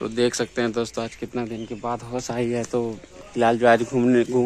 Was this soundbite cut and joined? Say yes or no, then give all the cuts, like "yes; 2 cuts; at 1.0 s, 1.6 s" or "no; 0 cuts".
no; 0 cuts